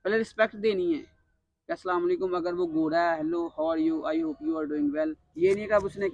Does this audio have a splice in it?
yes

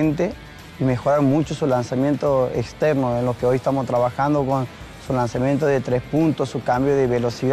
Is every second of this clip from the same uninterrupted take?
yes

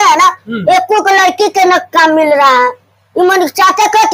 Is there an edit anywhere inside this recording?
no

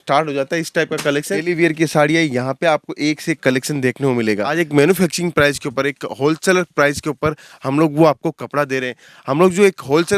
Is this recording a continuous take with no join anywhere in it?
no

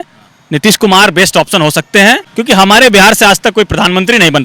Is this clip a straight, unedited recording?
no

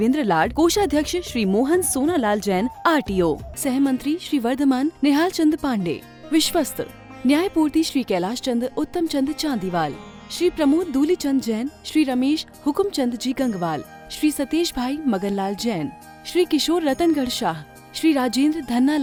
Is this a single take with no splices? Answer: yes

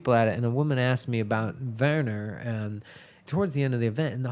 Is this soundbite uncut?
no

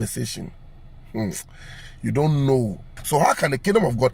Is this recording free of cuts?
no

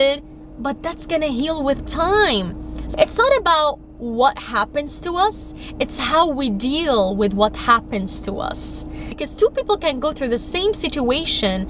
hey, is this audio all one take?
no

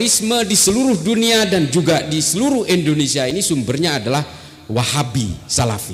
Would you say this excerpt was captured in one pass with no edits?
yes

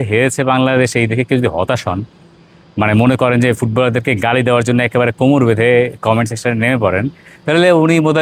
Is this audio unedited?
yes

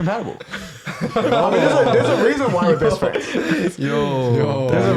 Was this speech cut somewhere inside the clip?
no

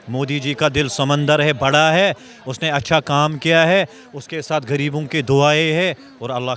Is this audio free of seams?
yes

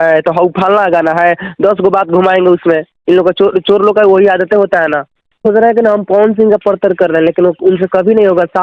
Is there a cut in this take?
yes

